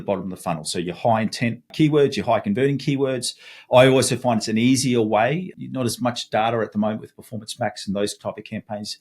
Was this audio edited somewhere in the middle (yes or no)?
yes